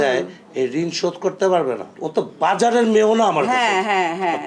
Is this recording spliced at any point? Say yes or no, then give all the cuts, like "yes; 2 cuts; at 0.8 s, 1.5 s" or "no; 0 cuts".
yes; 1 cut; at 1.9 s